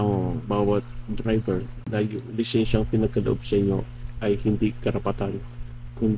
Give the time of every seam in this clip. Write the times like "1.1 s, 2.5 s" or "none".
1.8 s